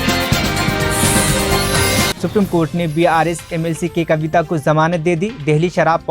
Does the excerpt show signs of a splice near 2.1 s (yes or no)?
yes